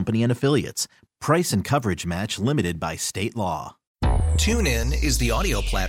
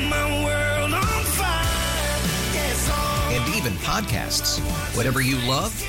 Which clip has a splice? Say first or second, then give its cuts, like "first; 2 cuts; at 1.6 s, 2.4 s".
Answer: first; 1 cut; at 3.8 s